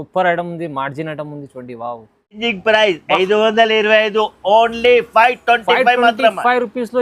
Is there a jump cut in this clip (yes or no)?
yes